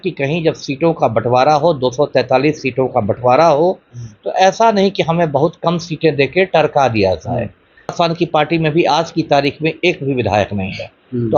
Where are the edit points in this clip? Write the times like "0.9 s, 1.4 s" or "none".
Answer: 7.9 s